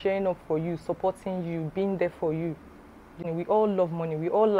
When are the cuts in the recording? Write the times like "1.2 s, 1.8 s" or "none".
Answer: 3.2 s